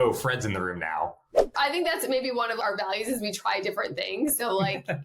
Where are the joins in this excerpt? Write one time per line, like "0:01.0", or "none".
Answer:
0:01.5
0:02.6